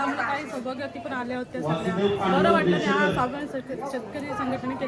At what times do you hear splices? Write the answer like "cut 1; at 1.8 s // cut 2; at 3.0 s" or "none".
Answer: none